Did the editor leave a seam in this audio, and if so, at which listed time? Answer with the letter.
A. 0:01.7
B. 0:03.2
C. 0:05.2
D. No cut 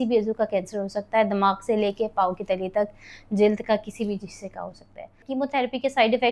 C